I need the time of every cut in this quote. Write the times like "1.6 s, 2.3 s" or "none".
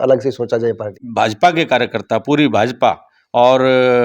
1.0 s